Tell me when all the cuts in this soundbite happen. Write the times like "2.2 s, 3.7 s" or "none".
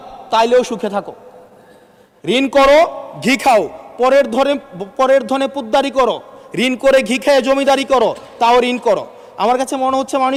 none